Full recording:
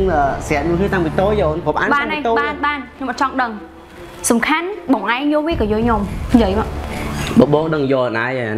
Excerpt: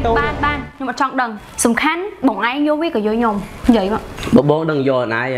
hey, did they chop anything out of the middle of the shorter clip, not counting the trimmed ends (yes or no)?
yes